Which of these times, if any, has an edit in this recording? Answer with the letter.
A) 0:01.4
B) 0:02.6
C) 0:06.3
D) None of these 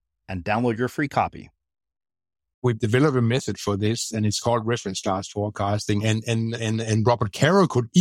B